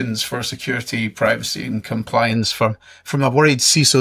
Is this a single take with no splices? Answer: yes; 0 cuts

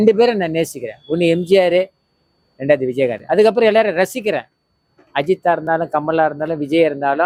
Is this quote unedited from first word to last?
yes; 0 cuts

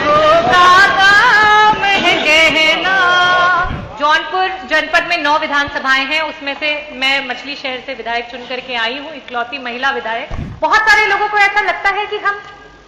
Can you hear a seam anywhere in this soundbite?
yes; 2 cuts; at 3.8 s, 10.4 s

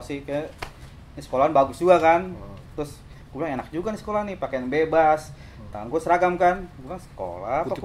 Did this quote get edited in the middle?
no; 0 cuts

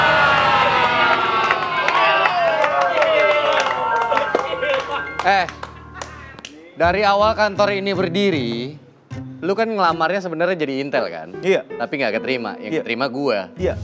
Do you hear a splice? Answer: no; 0 cuts

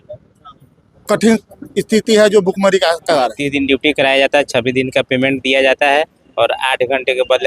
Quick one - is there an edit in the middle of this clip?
yes; 1 cut; at 3.4 s

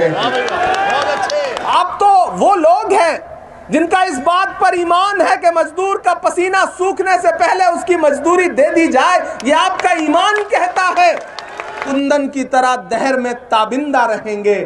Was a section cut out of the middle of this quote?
no; 0 cuts

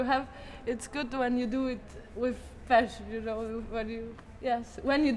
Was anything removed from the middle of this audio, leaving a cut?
yes; 1 cut; at 4.2 s

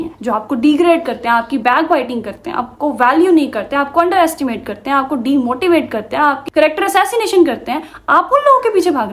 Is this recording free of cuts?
no; 1 cut; at 6.4 s

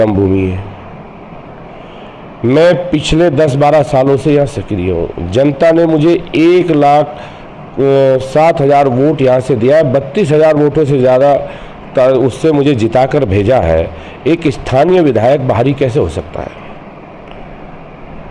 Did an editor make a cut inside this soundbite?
no; 0 cuts

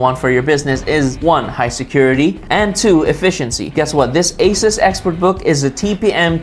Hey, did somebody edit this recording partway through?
yes; 1 cut; at 3.6 s

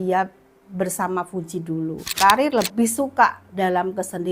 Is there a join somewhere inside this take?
yes; 1 cut; at 2.1 s

